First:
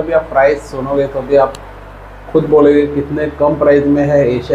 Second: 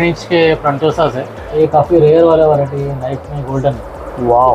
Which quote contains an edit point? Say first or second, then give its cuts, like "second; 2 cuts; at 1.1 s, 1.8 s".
second; 1 cut; at 1.4 s